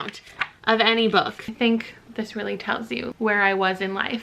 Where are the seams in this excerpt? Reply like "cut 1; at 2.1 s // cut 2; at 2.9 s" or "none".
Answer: cut 1; at 1.4 s // cut 2; at 3.1 s